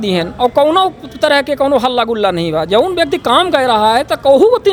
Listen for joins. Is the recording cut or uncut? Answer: uncut